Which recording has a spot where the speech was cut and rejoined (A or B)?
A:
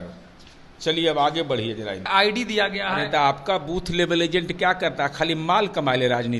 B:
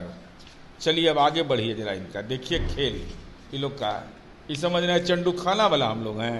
A